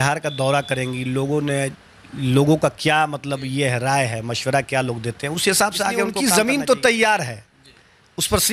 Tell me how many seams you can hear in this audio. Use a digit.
1